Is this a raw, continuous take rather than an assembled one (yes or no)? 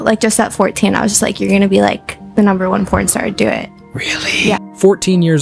yes